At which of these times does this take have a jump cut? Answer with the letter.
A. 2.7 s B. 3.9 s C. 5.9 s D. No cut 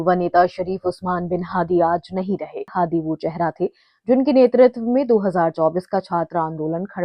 A